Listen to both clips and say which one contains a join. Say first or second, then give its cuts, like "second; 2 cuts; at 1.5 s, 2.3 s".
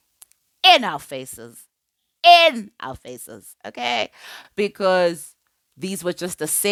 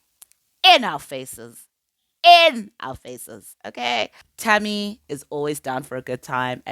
second; 1 cut; at 4.2 s